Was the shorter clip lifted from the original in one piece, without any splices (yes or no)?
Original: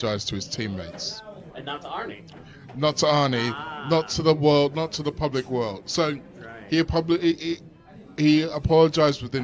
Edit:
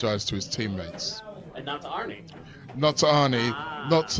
yes